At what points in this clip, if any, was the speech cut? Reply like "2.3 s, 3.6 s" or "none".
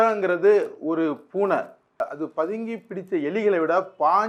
2.0 s